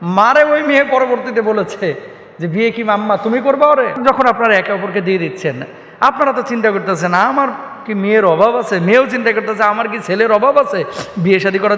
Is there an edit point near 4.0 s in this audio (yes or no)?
yes